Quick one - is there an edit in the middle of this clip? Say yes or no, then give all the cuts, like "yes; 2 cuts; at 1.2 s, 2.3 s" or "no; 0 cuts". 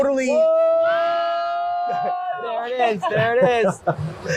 no; 0 cuts